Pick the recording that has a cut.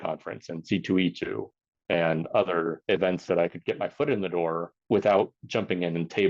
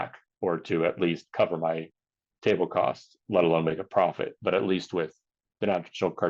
first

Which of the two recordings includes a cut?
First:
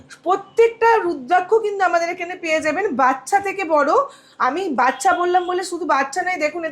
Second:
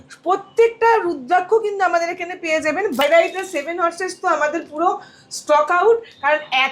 second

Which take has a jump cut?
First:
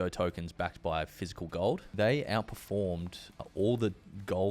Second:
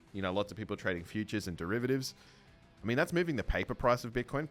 first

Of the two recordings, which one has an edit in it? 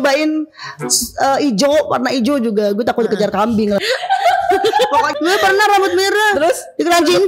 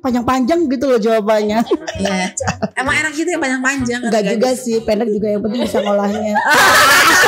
first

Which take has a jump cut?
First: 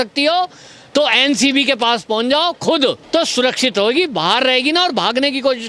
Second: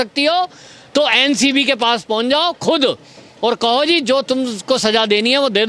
first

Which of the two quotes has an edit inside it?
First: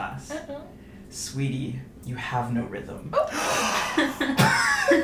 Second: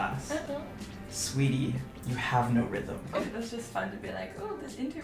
second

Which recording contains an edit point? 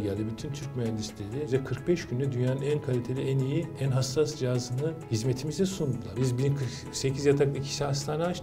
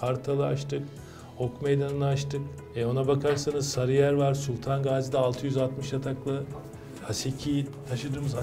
first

